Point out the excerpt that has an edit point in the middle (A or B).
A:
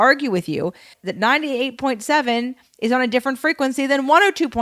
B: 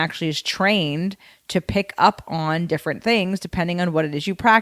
A